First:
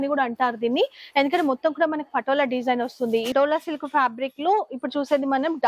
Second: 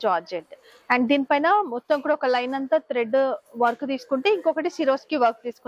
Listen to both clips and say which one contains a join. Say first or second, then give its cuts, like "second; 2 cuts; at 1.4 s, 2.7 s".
first; 1 cut; at 3.3 s